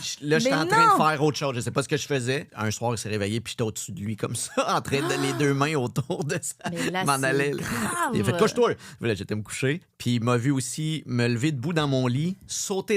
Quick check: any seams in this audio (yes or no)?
yes